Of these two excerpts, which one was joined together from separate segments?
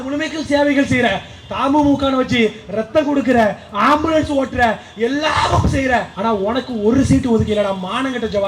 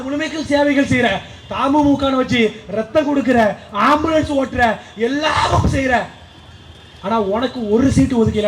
first; 1 cut; at 6.1 s

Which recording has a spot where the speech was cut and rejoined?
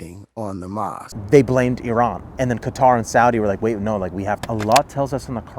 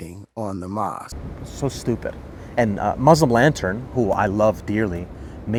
first; 3 cuts; at 1.1 s, 2.3 s, 4.4 s

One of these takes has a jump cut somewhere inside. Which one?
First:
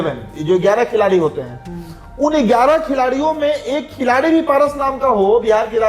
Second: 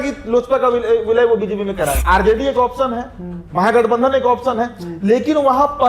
second; 1 cut; at 2.0 s

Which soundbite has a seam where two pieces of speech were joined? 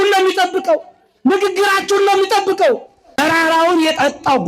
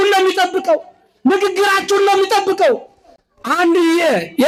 first; 1 cut; at 3.2 s

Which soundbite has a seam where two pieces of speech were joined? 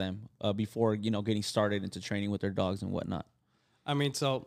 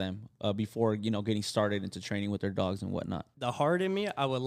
second; 1 cut; at 3.3 s

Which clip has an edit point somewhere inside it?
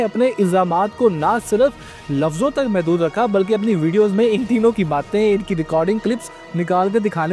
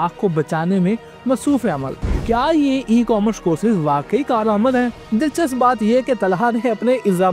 second; 2 cuts; at 2.0 s, 5.0 s

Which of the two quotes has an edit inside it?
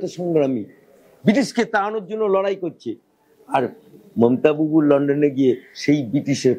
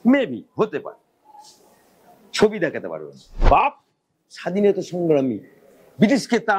second; 1 cut; at 3.4 s

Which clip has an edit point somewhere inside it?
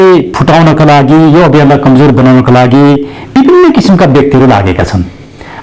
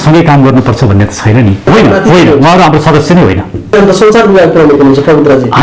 second; 2 cuts; at 1.7 s, 3.7 s

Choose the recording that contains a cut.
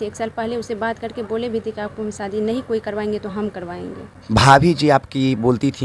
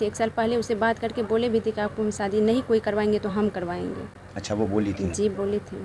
first; 1 cut; at 4.1 s

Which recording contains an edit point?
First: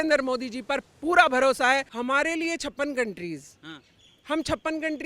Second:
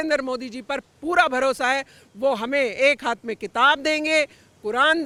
first; 1 cut; at 1.9 s

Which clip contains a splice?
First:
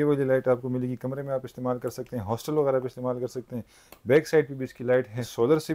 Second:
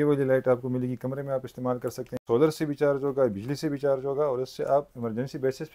second; 1 cut; at 2.1 s

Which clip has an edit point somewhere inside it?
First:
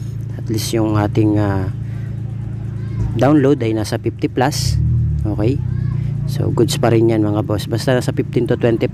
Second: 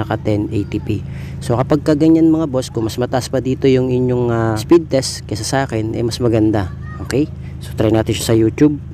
second; 1 cut; at 4.6 s

